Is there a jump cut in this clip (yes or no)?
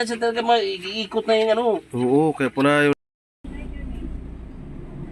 yes